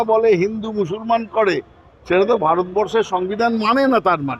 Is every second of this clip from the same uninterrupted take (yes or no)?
yes